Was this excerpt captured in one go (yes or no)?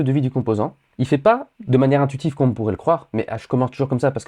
yes